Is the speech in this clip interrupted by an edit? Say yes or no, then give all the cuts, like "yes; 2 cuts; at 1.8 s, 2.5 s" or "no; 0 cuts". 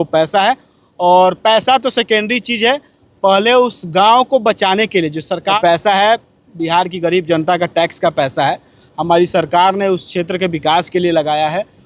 yes; 1 cut; at 5.6 s